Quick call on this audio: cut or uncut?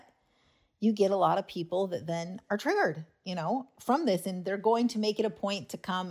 uncut